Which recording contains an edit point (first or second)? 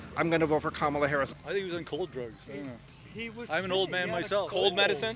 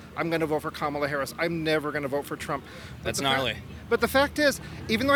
first